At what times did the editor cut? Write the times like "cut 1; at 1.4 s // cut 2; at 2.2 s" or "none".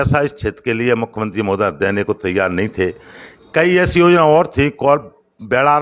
none